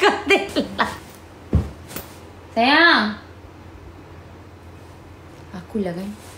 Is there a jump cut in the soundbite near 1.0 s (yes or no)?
yes